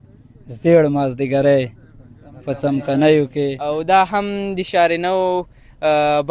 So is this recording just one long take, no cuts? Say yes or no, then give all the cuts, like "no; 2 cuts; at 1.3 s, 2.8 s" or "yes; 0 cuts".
no; 1 cut; at 3.6 s